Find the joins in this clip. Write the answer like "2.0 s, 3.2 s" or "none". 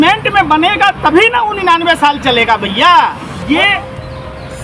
3.3 s